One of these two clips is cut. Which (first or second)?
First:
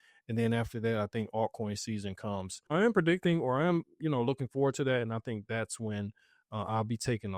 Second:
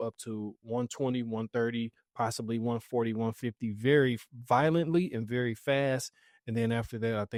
first